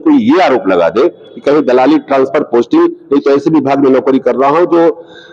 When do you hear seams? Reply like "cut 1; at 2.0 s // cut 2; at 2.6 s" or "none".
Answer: none